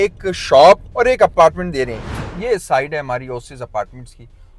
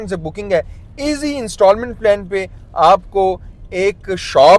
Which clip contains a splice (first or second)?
first